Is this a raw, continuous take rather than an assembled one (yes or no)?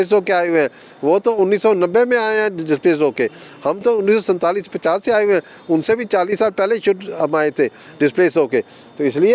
yes